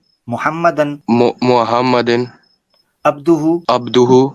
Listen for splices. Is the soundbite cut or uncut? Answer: cut